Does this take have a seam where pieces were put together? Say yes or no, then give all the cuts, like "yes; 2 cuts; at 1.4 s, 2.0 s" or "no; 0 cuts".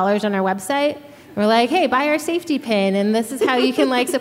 no; 0 cuts